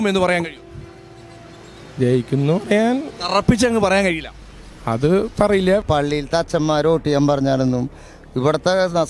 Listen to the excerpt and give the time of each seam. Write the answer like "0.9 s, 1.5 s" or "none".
5.8 s

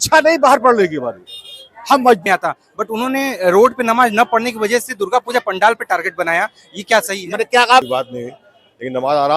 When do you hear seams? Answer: 2.2 s, 7.9 s

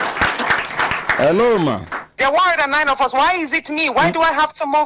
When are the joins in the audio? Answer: 2.2 s

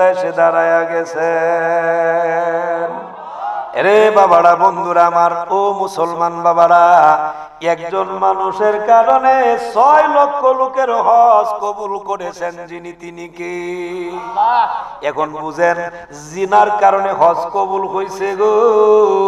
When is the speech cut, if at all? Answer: 3.5 s

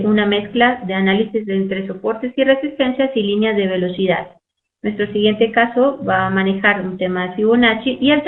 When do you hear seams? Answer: 1.7 s

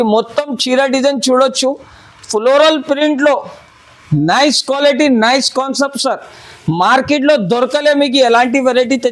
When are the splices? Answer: none

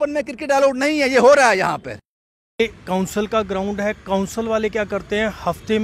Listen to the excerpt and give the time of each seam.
2.6 s

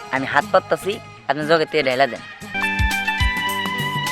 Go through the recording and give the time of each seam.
2.5 s

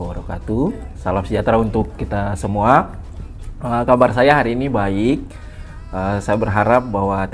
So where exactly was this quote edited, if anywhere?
none

